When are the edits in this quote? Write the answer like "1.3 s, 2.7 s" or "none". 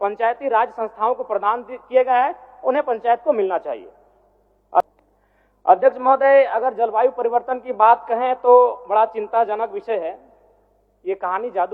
4.8 s